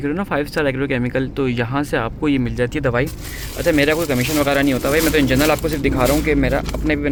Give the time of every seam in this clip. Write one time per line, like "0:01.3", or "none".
none